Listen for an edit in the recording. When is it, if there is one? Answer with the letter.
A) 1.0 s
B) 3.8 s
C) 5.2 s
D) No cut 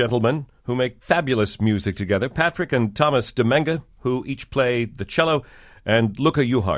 A